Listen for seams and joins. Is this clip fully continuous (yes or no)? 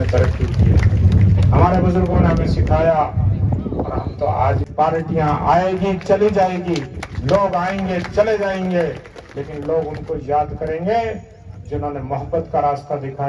no